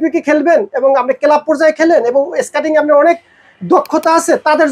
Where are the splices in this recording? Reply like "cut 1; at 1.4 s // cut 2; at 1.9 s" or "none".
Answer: none